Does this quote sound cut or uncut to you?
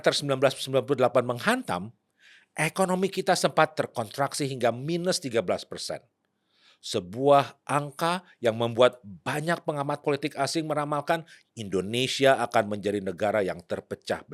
uncut